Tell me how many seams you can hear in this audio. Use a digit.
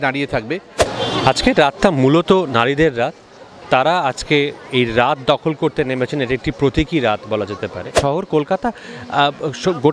2